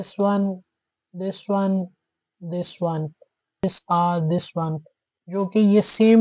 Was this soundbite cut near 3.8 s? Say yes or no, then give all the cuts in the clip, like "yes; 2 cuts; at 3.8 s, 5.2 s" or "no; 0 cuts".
yes; 1 cut; at 3.8 s